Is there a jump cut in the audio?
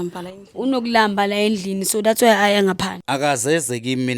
yes; 1 cut; at 2.9 s

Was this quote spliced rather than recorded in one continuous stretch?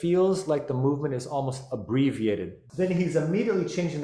yes; 1 cut; at 2.6 s

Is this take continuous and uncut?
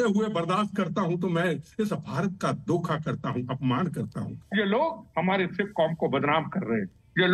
no; 1 cut; at 4.4 s

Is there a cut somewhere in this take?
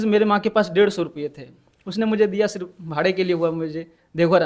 no; 0 cuts

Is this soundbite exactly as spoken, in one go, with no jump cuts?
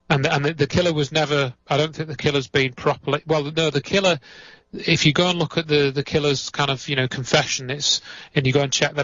yes; 0 cuts

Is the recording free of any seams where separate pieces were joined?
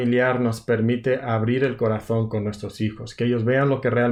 yes; 0 cuts

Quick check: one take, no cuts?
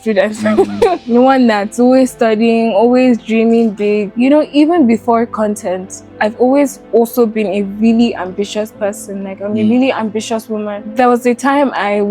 no; 3 cuts; at 1.0 s, 4.1 s, 10.8 s

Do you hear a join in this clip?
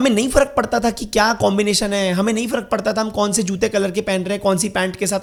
no; 0 cuts

